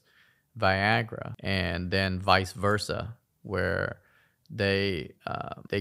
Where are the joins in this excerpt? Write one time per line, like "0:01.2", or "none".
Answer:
none